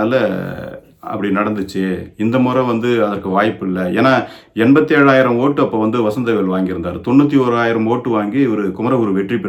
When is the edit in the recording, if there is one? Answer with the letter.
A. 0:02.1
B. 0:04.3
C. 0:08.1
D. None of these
D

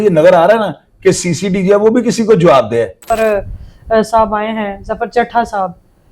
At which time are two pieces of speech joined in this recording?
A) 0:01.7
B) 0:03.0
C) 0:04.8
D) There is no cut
B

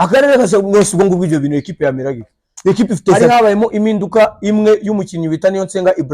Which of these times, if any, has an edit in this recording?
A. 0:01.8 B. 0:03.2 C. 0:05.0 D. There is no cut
B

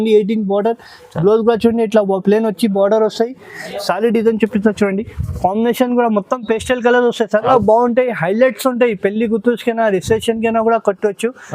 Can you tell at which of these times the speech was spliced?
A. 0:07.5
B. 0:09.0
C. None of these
A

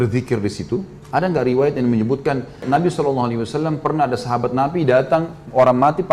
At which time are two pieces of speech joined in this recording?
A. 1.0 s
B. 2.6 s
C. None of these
B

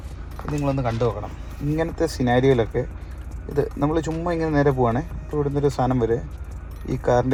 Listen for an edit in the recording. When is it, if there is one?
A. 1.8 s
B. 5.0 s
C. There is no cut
C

